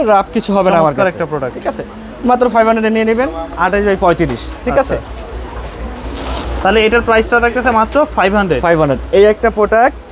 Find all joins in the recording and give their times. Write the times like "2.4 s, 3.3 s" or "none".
none